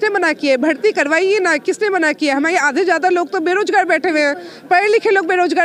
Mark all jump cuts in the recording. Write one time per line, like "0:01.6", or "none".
none